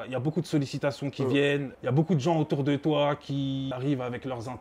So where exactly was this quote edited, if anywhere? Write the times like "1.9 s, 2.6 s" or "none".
1.7 s, 3.7 s